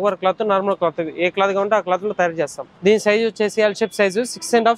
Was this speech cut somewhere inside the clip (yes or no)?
yes